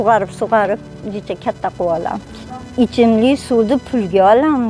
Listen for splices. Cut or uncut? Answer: cut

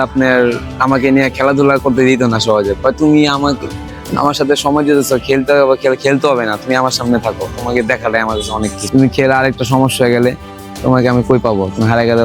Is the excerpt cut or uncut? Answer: uncut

